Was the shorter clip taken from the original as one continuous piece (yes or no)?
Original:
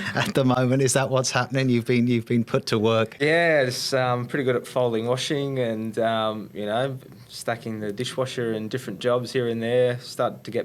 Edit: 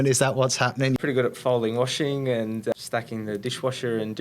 no